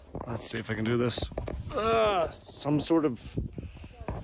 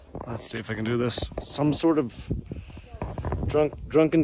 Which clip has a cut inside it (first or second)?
second